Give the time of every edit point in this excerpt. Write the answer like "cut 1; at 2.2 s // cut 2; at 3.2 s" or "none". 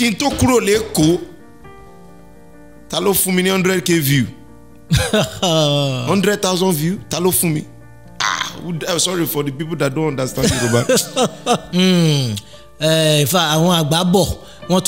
cut 1; at 11.6 s